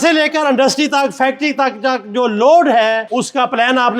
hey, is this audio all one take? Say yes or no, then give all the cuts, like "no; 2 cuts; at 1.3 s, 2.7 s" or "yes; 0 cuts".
no; 1 cut; at 3.0 s